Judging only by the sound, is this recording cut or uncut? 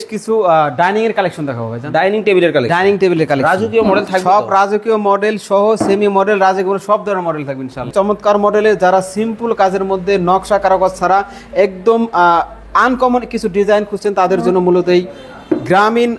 cut